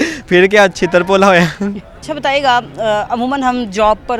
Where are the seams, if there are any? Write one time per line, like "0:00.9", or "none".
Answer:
none